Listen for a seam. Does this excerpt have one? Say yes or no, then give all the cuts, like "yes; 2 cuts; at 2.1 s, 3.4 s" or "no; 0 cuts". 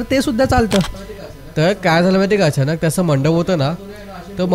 yes; 1 cut; at 0.9 s